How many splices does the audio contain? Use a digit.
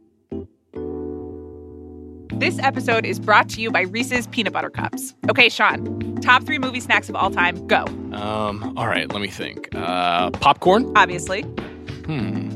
0